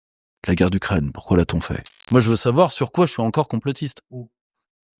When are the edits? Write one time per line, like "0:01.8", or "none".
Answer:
0:02.0